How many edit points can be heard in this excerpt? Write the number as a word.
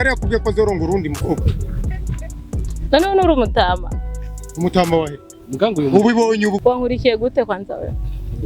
one